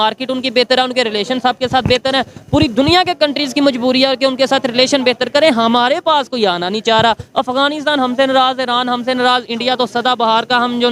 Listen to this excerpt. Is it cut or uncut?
uncut